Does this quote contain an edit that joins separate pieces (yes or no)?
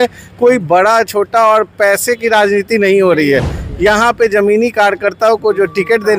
no